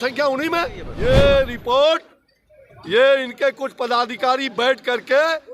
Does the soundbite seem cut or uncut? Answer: cut